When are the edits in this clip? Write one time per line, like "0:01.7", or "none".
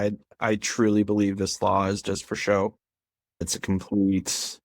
0:03.5